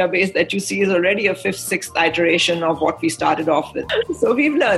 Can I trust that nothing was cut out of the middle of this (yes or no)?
no